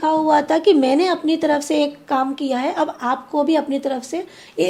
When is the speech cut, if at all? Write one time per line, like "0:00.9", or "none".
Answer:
none